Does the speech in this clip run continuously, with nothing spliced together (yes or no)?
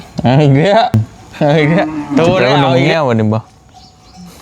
no